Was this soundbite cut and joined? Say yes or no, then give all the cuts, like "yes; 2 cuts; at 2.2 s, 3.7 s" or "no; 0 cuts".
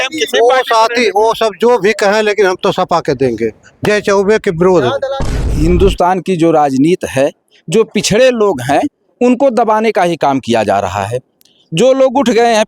yes; 1 cut; at 5.2 s